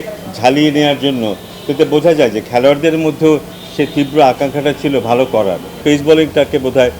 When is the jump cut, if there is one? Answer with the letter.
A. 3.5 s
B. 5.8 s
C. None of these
B